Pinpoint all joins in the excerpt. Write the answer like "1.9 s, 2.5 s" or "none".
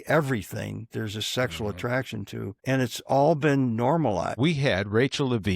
2.5 s, 4.4 s